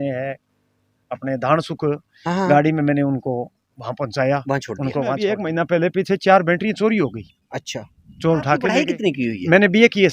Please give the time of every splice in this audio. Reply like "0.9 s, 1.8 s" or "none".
5.2 s, 8.7 s